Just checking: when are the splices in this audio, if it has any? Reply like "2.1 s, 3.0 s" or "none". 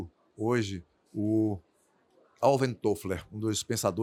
none

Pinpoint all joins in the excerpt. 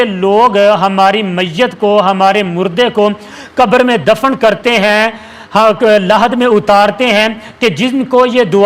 none

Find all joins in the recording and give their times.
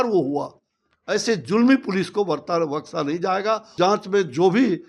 3.7 s

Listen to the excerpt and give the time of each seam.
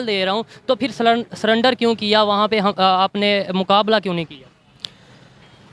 none

